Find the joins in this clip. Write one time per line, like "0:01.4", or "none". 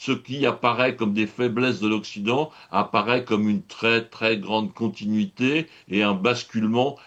none